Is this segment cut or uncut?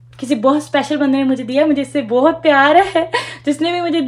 uncut